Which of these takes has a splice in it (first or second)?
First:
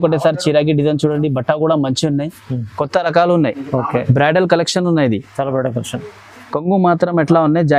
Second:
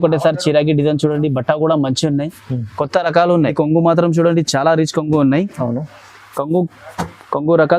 second